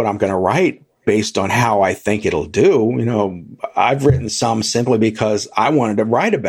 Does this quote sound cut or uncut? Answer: uncut